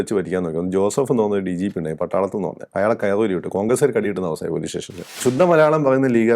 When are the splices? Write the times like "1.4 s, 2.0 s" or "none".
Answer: 5.2 s